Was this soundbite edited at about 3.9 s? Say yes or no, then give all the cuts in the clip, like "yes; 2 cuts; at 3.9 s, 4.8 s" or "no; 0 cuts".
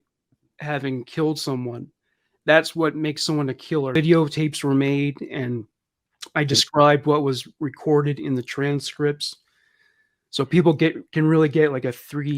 yes; 1 cut; at 3.9 s